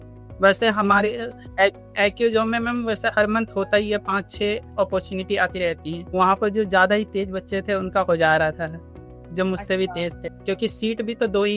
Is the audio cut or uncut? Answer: cut